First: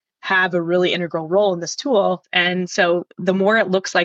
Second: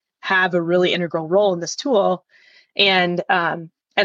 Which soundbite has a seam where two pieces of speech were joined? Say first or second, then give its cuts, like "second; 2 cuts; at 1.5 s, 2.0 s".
first; 1 cut; at 2.3 s